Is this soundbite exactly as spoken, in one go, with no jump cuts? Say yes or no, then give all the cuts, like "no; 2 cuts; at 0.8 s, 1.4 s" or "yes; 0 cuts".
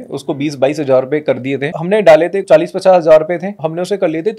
no; 3 cuts; at 1.7 s, 2.4 s, 3.6 s